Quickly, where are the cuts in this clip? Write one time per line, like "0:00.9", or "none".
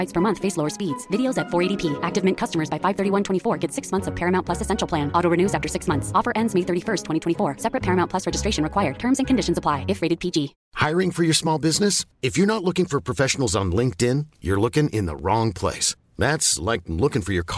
0:10.6